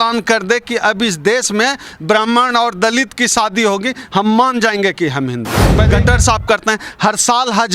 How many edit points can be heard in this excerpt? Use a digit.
1